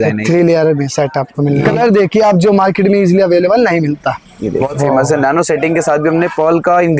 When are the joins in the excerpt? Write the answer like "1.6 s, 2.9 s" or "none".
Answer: 1.8 s, 4.7 s